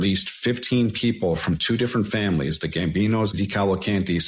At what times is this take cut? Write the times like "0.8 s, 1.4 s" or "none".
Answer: 3.3 s